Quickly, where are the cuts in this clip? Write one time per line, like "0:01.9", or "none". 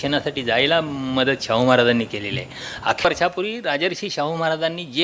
0:03.0